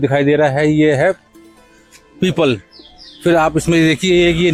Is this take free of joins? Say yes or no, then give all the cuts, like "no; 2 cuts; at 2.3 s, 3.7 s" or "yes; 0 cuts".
yes; 0 cuts